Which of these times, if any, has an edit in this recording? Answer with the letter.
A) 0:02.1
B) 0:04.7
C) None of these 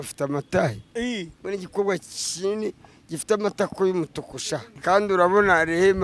B